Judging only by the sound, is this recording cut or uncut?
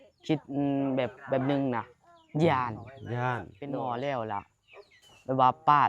cut